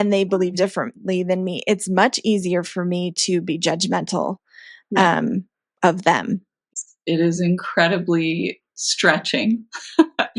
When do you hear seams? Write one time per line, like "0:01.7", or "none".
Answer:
0:06.7

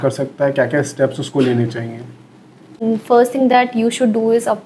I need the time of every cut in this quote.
0:02.8

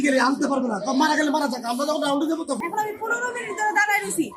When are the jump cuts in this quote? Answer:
0:02.6

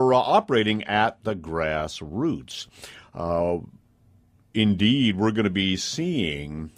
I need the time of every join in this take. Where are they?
none

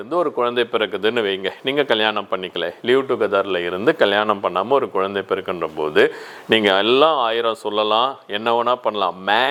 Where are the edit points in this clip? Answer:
none

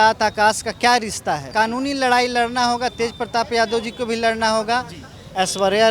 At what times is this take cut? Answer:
0:01.5

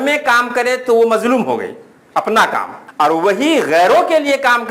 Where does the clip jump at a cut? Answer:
0:02.8

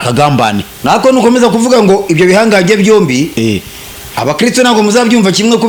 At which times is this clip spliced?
none

